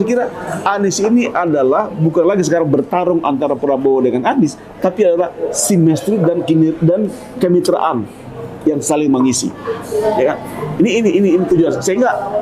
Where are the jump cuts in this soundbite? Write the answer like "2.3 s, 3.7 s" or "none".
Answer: none

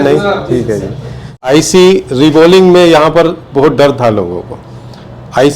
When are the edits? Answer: 1.4 s

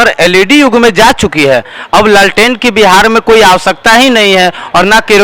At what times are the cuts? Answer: none

